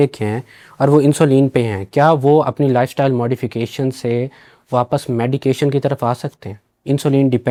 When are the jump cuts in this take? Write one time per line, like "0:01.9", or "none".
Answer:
none